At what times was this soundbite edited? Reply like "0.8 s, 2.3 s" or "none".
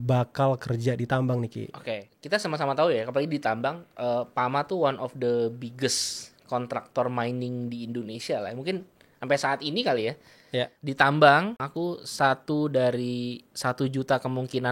2.1 s, 10.8 s, 11.7 s